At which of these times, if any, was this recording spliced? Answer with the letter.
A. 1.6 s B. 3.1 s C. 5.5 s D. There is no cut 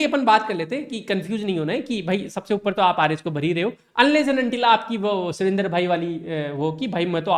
D